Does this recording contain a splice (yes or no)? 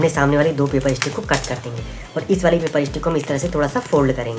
no